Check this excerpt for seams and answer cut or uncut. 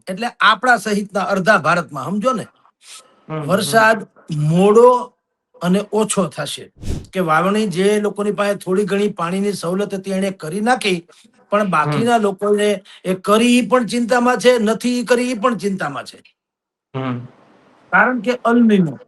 cut